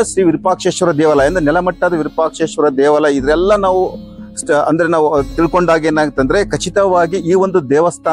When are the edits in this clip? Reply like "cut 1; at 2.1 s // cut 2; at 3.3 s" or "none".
none